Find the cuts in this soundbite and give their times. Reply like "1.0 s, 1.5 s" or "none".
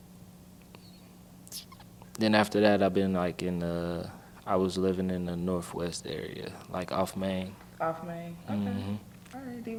none